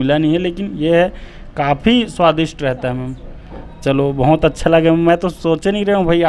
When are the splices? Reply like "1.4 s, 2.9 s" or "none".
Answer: none

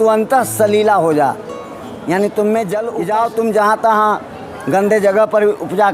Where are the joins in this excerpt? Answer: 2.9 s

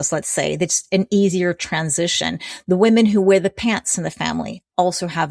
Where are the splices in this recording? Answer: none

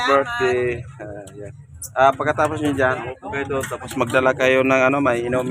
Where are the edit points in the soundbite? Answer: none

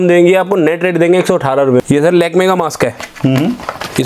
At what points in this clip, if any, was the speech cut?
1.8 s

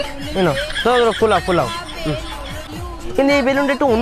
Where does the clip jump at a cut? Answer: 2.6 s

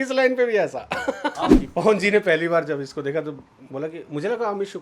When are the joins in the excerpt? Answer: 1.6 s

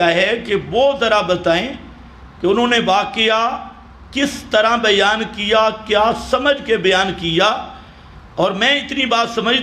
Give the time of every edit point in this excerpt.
none

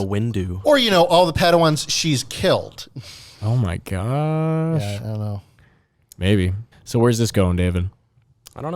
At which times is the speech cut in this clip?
6.6 s

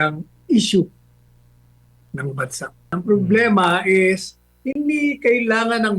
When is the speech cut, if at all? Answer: 3.0 s

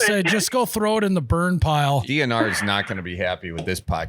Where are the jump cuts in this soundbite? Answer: 2.1 s

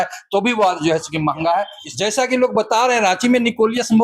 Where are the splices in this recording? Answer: 1.8 s

